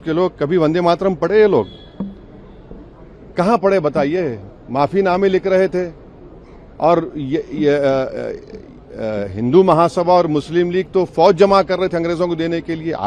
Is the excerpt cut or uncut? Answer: uncut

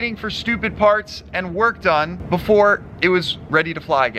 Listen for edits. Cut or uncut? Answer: uncut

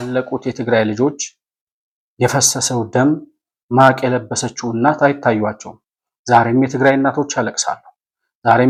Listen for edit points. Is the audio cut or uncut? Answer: uncut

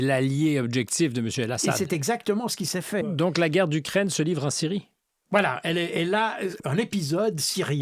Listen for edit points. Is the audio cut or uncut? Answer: cut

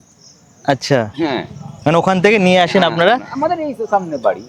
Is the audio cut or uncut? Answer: uncut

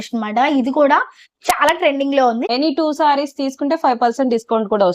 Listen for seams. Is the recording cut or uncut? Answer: cut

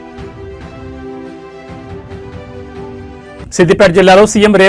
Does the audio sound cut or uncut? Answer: cut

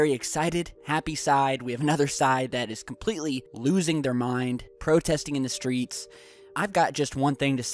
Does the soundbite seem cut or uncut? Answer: cut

